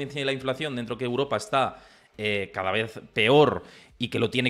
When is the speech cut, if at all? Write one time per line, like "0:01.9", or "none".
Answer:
none